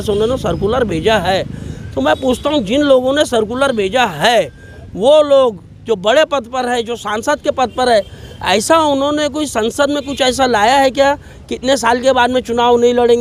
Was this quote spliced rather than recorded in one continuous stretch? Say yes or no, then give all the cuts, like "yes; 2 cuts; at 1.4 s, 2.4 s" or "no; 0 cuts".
no; 0 cuts